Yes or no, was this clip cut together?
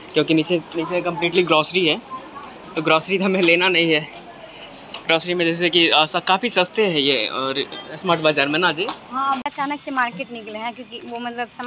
yes